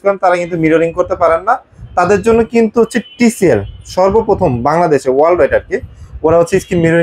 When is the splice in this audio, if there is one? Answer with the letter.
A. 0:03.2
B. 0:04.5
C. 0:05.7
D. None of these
D